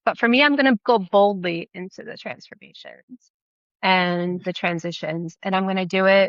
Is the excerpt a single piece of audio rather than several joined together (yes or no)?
yes